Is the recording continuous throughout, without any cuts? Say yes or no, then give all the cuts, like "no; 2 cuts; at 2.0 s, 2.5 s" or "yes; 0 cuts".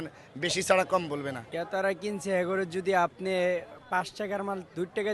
no; 1 cut; at 1.5 s